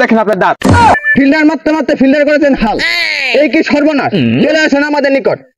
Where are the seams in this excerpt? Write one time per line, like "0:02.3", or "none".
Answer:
0:00.9